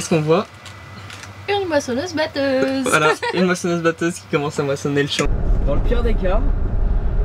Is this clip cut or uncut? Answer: cut